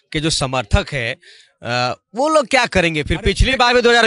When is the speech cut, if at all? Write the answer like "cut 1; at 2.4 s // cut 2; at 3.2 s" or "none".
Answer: none